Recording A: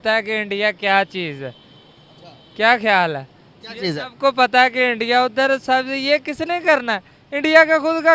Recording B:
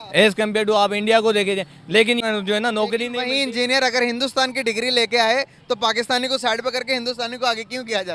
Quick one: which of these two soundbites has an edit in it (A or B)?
B